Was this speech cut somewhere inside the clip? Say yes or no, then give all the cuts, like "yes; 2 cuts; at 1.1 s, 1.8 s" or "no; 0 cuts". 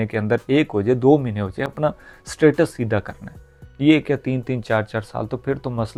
no; 0 cuts